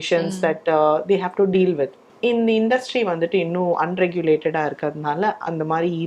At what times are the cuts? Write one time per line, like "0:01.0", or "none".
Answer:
0:02.0